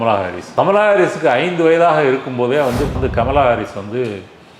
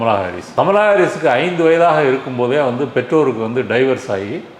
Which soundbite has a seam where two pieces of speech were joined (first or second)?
first